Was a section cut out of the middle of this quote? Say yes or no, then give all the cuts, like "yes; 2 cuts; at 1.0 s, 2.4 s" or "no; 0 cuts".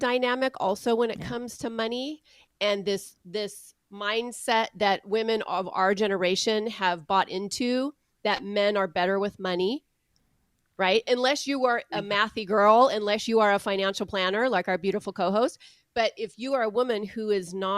no; 0 cuts